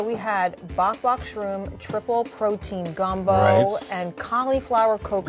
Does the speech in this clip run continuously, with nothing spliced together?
yes; 0 cuts

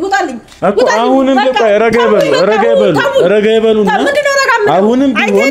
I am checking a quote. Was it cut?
no; 0 cuts

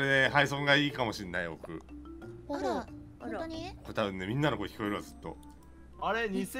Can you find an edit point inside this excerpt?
no; 0 cuts

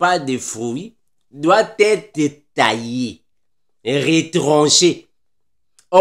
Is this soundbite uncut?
yes; 0 cuts

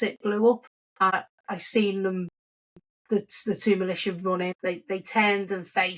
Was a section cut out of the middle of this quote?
yes; 2 cuts; at 1.1 s, 4.6 s

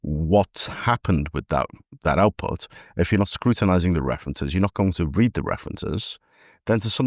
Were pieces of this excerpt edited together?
no; 0 cuts

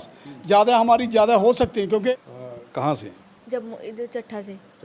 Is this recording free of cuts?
no; 1 cut; at 2.1 s

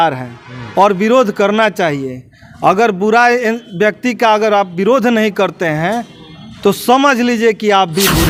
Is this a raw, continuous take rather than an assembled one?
yes; 0 cuts

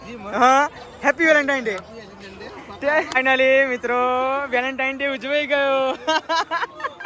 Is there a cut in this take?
yes; 1 cut; at 3.1 s

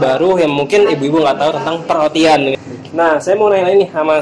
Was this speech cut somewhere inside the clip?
yes; 1 cut; at 2.6 s

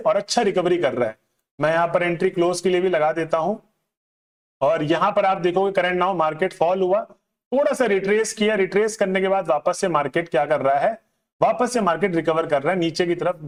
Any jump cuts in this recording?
no; 0 cuts

